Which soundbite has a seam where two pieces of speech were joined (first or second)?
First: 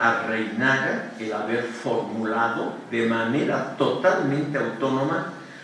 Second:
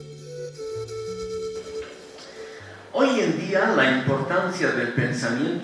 first